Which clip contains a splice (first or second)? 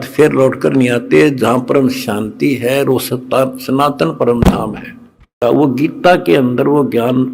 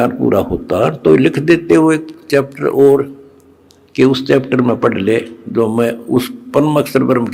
first